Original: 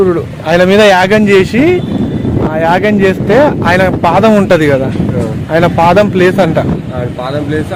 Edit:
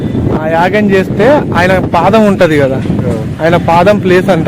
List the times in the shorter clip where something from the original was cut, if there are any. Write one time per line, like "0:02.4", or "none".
none

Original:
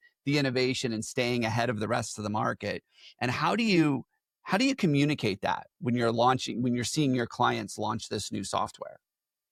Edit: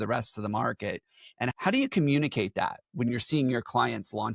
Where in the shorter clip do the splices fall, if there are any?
0:01.5
0:03.1

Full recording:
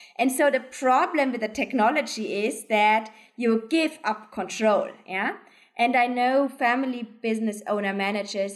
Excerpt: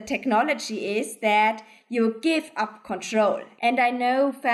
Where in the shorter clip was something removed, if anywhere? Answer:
0:03.5

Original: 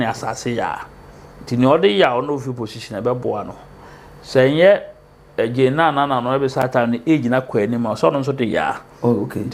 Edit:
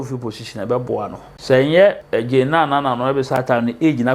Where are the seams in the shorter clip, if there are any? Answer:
0:01.3
0:02.0

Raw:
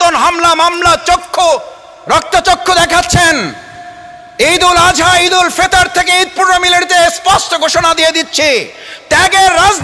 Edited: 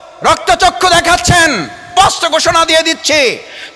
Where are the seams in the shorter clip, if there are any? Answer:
0:01.9

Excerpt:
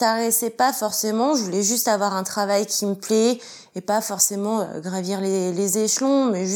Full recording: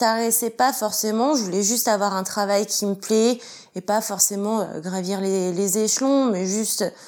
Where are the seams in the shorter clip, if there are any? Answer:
none

